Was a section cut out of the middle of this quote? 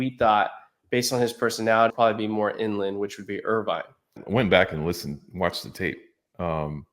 yes; 2 cuts; at 1.9 s, 4.1 s

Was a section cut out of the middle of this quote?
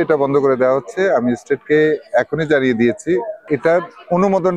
yes; 1 cut; at 3.4 s

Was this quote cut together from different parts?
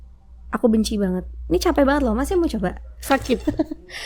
no; 0 cuts

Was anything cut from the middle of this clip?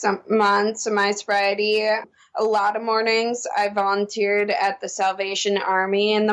no; 0 cuts

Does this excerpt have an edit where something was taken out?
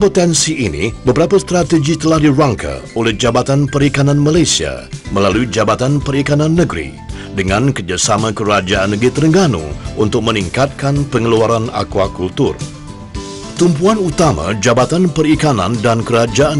yes; 1 cut; at 13.5 s

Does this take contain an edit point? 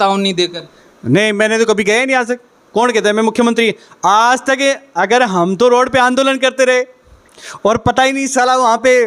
no; 0 cuts

